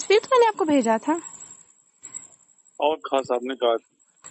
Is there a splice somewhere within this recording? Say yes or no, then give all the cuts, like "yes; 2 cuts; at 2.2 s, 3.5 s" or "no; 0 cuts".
yes; 1 cut; at 3.3 s